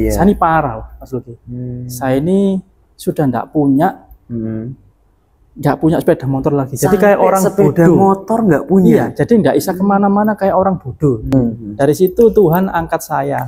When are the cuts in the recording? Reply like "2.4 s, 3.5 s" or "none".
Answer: 11.3 s